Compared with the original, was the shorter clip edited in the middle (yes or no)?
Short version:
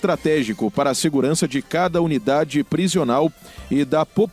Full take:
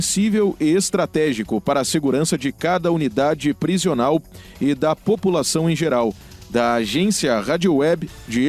no